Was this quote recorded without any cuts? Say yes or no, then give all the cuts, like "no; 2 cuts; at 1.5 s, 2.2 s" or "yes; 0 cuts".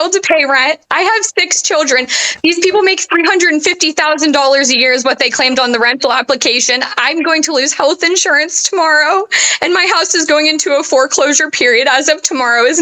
yes; 0 cuts